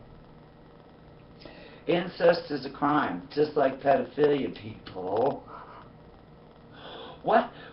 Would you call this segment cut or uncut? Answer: cut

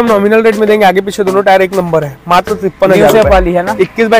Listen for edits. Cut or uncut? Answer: uncut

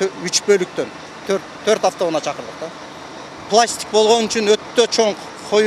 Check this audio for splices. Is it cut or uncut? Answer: cut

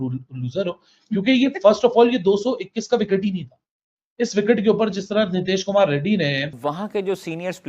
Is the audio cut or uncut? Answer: cut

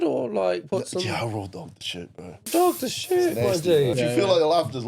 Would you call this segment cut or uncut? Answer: cut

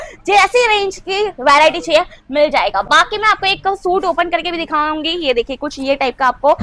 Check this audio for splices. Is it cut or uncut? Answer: uncut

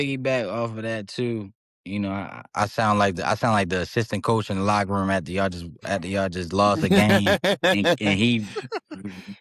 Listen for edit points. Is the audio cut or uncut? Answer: uncut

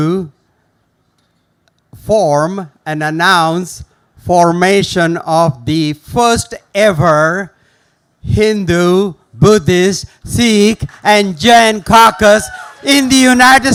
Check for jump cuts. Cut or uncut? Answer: uncut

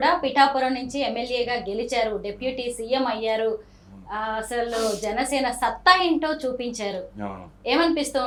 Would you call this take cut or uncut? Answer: uncut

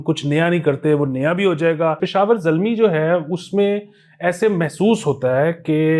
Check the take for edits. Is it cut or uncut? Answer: cut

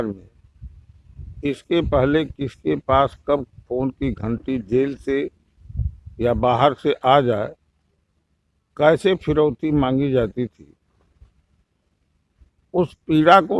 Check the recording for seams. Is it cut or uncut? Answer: uncut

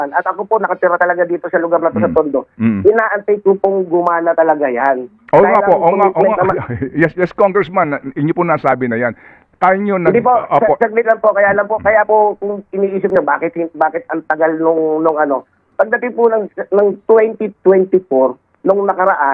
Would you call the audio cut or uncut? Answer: uncut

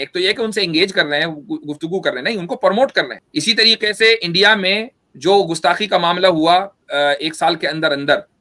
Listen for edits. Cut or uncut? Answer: cut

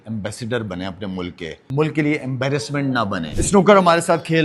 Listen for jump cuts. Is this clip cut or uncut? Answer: cut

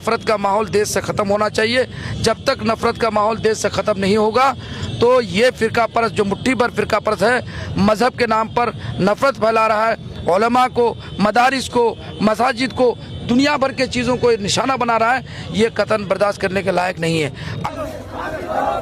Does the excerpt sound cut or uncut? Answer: cut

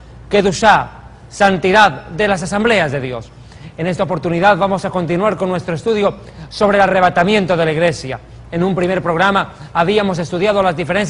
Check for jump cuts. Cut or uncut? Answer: uncut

